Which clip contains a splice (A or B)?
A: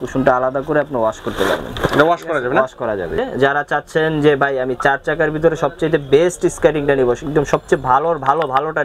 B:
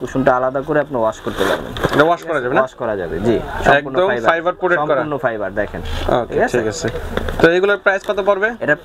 A